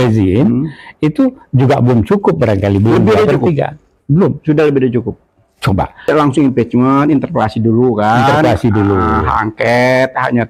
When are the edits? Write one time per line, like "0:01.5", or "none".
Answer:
0:06.1